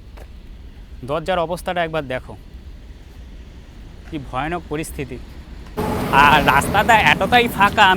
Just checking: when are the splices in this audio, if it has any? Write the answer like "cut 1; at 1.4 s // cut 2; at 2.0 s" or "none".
cut 1; at 5.8 s